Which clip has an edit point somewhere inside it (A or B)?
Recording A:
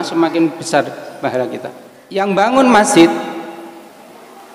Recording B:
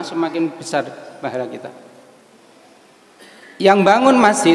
A